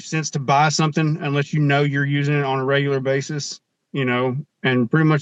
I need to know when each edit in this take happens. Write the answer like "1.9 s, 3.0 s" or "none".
none